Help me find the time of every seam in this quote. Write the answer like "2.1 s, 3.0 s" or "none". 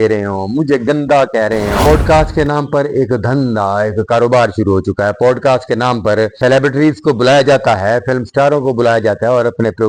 1.8 s, 6.4 s